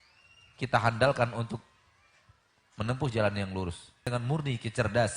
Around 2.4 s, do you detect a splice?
no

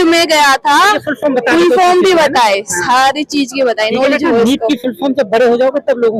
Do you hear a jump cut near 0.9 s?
no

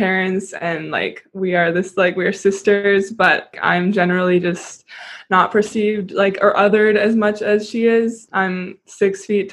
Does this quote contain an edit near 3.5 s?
yes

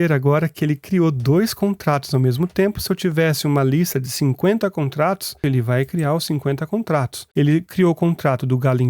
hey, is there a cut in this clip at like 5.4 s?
yes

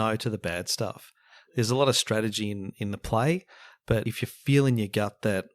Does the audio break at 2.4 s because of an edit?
no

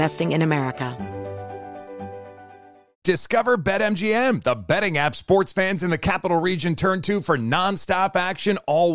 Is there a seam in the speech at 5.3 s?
no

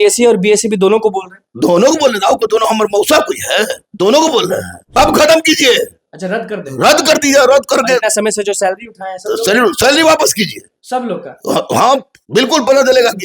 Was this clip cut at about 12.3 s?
no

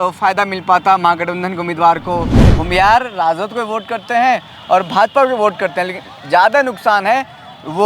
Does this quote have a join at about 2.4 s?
yes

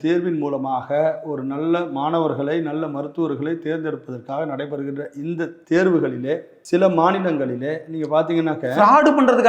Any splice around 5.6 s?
yes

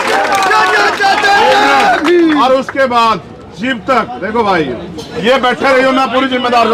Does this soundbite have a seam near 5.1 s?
yes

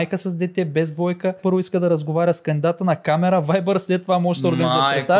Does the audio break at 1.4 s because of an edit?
yes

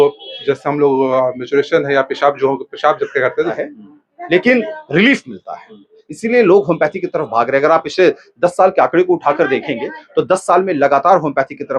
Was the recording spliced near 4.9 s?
no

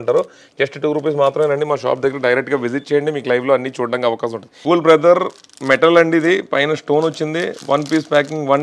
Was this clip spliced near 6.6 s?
no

